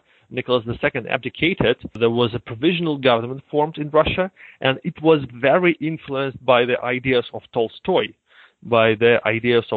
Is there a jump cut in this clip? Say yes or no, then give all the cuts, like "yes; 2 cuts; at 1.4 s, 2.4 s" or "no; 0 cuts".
no; 0 cuts